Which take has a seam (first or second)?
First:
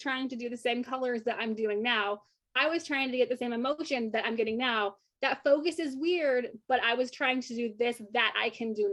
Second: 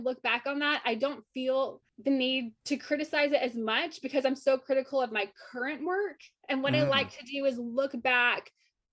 second